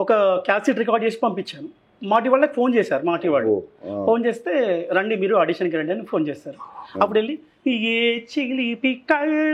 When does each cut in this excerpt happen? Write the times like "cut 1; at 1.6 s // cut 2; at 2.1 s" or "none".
none